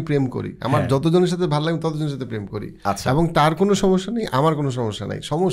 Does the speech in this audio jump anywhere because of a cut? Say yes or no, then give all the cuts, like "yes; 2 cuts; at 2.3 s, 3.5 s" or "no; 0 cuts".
no; 0 cuts